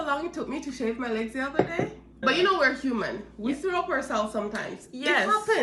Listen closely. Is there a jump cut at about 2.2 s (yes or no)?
yes